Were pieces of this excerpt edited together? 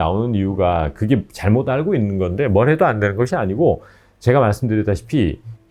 no; 0 cuts

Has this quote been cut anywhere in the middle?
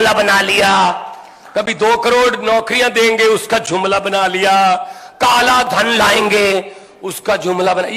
no; 0 cuts

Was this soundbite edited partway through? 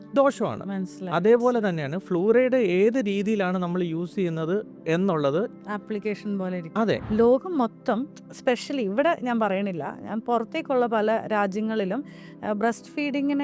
yes; 1 cut; at 7.0 s

